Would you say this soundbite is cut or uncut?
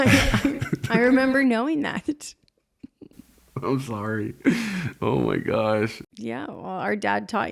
cut